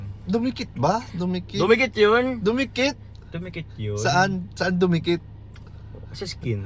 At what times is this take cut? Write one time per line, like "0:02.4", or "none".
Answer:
none